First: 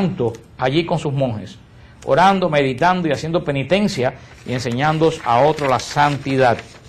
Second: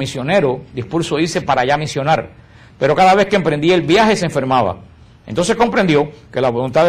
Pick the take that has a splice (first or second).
second